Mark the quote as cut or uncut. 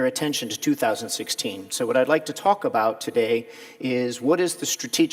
uncut